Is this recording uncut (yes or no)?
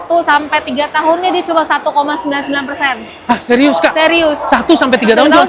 yes